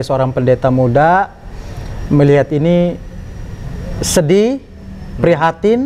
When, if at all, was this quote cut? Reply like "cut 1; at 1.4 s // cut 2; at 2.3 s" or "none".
none